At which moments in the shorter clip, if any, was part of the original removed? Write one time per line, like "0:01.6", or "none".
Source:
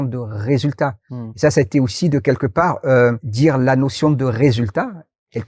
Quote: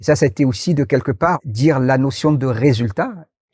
0:01.4